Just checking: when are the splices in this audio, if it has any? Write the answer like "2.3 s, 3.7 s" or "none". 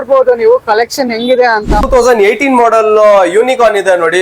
1.9 s